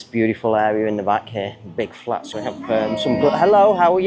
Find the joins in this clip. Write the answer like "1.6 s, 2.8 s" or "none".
2.3 s